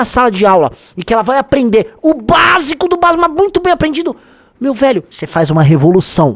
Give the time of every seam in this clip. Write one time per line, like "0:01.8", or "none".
0:05.2